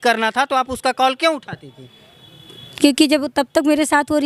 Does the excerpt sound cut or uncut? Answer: uncut